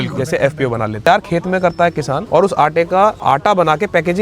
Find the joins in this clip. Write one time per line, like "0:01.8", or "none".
0:01.1
0:02.2
0:03.2